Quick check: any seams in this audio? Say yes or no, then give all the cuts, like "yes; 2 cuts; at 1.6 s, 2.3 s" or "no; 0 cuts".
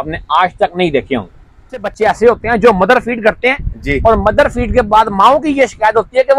yes; 1 cut; at 1.9 s